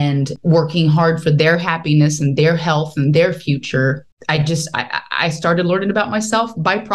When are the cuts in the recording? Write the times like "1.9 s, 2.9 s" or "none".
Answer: 4.1 s